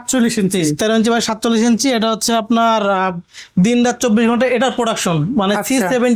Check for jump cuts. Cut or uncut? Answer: uncut